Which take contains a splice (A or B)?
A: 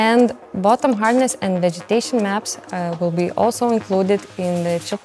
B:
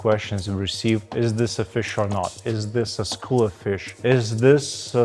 B